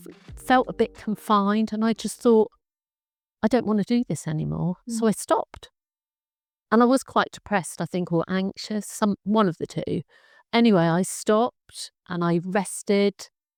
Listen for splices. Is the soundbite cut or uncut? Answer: uncut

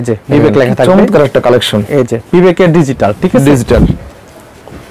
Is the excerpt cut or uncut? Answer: uncut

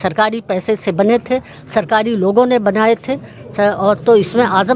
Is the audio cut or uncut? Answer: uncut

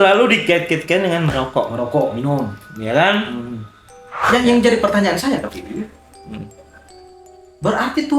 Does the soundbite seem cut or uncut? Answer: cut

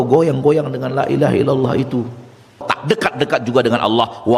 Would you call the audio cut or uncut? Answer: cut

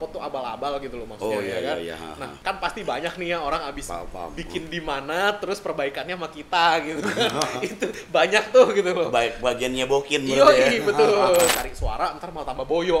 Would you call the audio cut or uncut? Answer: cut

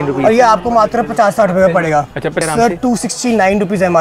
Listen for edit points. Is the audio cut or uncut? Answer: cut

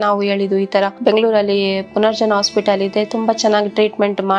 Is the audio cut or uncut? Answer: uncut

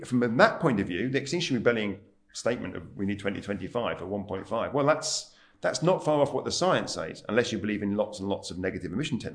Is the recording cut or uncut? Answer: uncut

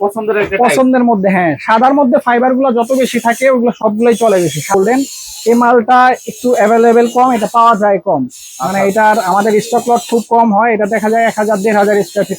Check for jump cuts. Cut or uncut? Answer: cut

